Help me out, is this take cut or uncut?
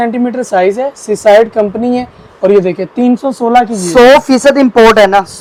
uncut